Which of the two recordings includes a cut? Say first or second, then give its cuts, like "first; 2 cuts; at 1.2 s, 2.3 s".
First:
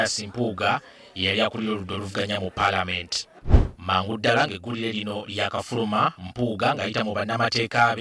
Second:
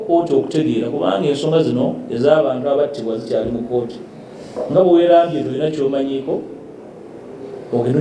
first; 1 cut; at 3.3 s